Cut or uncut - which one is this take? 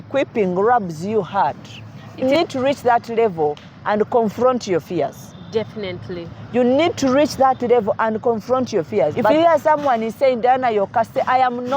cut